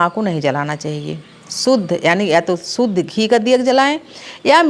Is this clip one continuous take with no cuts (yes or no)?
yes